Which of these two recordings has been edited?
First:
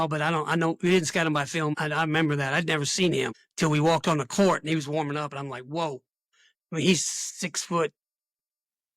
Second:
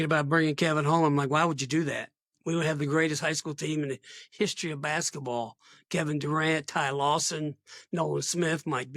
first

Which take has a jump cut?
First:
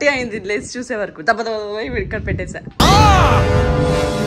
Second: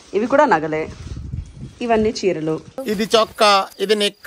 second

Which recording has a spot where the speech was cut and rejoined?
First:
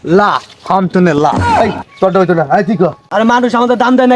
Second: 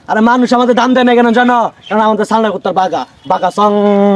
first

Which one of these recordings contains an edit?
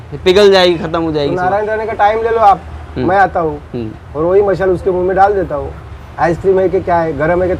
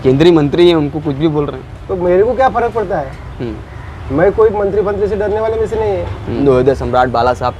second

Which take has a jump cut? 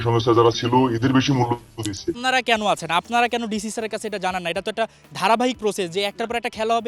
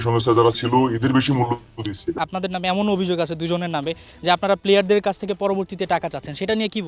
first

